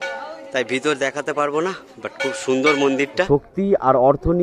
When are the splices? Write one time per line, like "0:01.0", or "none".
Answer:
0:03.3